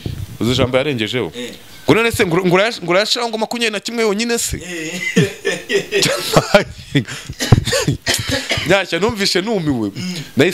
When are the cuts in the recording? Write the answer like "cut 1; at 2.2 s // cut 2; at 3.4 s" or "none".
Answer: none